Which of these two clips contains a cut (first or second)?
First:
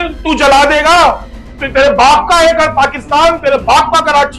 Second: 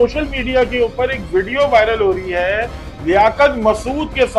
first